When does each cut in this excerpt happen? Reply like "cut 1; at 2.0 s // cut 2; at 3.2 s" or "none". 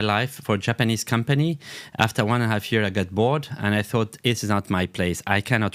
none

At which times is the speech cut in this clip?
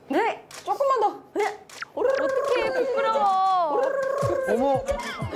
none

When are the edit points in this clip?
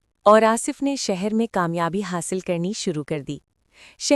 none

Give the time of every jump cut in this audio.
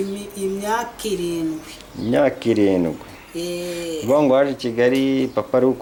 none

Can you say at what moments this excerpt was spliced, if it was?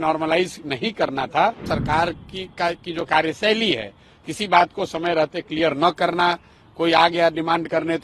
cut 1; at 1.7 s

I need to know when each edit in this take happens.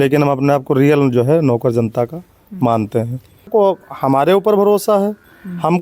cut 1; at 3.5 s

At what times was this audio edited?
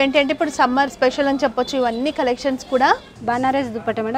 cut 1; at 0.9 s // cut 2; at 3.2 s

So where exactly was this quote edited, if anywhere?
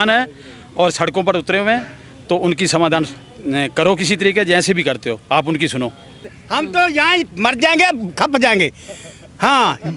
cut 1; at 6.4 s

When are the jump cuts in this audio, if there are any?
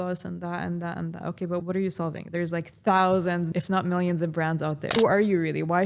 cut 1; at 1.6 s // cut 2; at 3.5 s // cut 3; at 4.9 s

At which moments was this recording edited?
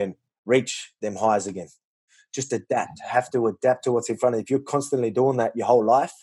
cut 1; at 2.2 s

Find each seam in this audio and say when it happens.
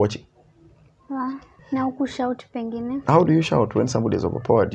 cut 1; at 1.5 s

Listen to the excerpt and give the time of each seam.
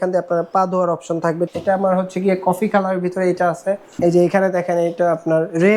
cut 1; at 1.5 s // cut 2; at 4.0 s

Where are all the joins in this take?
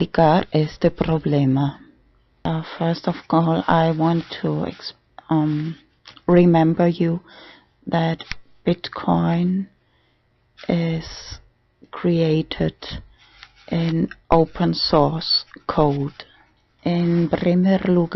cut 1; at 10.0 s

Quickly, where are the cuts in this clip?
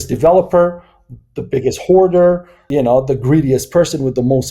cut 1; at 2.5 s

